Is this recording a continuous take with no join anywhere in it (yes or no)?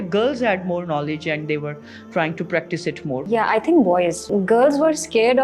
no